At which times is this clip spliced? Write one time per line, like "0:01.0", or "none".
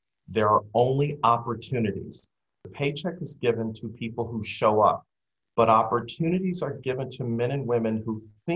0:02.6